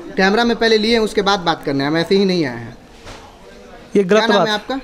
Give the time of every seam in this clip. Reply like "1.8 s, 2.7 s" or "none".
none